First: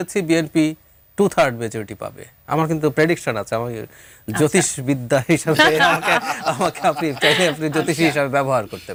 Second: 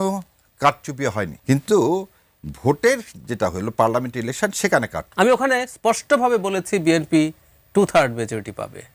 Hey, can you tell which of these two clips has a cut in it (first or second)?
second